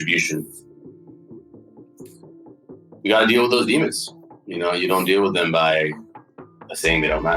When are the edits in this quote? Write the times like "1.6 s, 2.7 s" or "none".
6.1 s